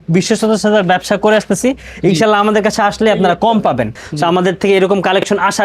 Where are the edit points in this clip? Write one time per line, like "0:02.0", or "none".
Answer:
0:04.0